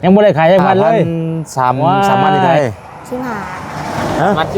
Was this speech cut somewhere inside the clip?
yes; 1 cut; at 2.5 s

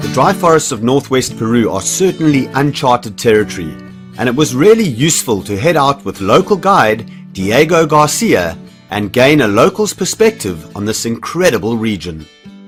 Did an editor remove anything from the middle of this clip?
no; 0 cuts

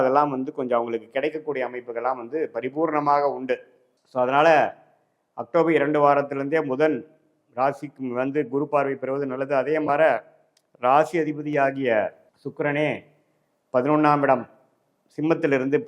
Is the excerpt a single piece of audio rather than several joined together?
yes; 0 cuts

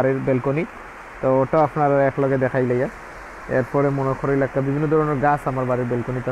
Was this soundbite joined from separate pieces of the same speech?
no; 0 cuts

